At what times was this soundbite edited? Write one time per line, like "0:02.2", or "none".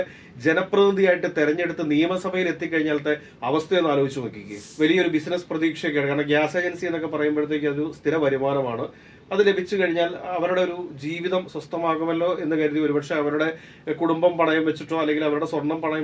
0:04.6